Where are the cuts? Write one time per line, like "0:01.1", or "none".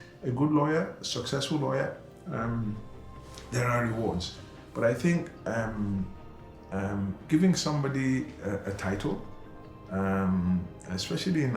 none